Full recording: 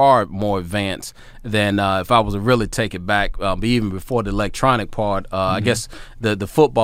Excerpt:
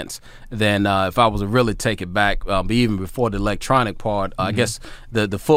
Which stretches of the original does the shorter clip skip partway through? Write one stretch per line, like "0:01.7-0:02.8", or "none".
0:05.3-0:05.5